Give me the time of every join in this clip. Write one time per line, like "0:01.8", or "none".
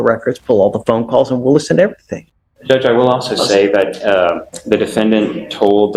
none